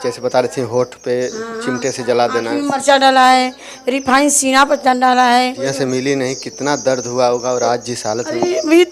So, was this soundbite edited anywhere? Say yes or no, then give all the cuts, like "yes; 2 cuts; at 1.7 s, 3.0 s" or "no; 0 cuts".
yes; 1 cut; at 5.6 s